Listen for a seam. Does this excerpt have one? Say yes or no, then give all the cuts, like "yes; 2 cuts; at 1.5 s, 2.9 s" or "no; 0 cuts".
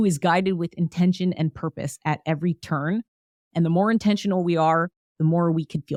no; 0 cuts